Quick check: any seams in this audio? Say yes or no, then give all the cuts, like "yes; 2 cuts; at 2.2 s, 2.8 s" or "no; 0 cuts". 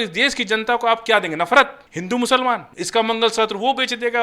yes; 2 cuts; at 1.9 s, 2.7 s